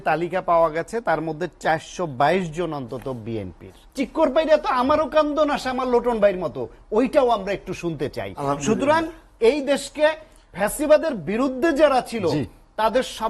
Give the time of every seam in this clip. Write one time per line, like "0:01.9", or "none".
0:03.8